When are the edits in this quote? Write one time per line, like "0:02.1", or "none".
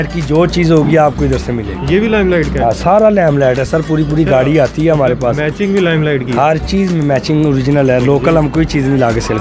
none